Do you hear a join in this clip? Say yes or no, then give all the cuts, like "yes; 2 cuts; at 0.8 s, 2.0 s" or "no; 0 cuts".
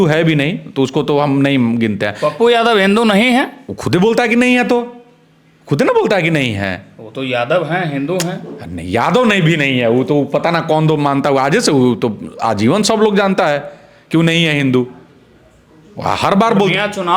no; 0 cuts